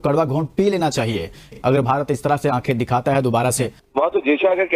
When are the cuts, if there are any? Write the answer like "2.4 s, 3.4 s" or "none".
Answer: 1.5 s, 3.8 s